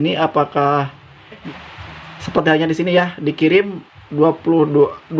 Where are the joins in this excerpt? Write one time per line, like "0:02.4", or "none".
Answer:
0:01.4